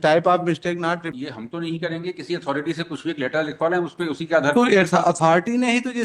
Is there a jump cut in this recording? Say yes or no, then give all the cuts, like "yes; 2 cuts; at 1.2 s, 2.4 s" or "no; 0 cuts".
yes; 1 cut; at 1.1 s